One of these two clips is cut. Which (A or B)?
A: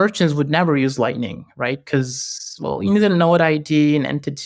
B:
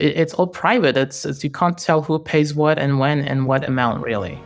B